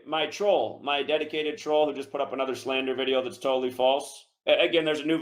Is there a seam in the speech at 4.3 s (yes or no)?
yes